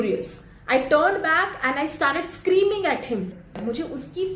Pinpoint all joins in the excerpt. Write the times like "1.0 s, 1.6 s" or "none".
3.4 s